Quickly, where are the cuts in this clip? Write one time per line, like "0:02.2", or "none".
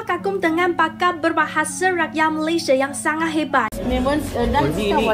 0:03.7